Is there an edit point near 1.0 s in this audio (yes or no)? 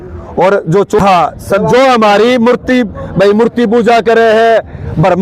yes